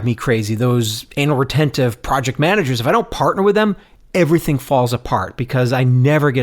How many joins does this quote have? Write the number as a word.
zero